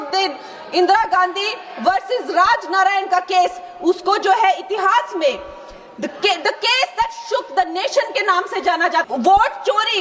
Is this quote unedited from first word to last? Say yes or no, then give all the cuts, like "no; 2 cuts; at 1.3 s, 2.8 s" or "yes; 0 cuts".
no; 1 cut; at 9.0 s